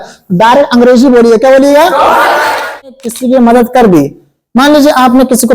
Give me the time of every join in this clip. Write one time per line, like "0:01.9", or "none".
0:02.8